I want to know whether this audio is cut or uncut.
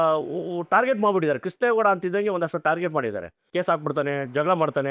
cut